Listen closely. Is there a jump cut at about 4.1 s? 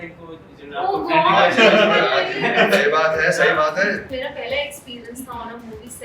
yes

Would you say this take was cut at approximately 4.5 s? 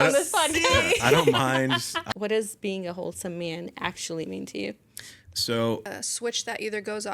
no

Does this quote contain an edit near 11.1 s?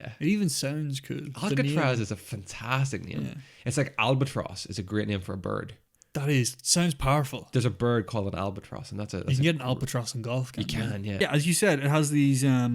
yes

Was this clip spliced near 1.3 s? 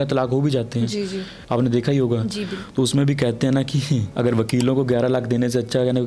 yes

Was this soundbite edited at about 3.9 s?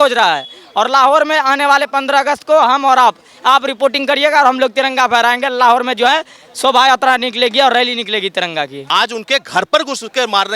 no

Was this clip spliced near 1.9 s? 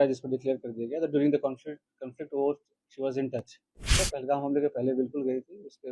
no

